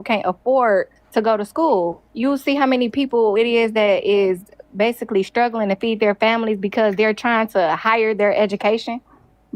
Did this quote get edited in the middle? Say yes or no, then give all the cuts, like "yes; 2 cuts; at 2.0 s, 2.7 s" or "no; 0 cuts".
yes; 2 cuts; at 1.0 s, 2.0 s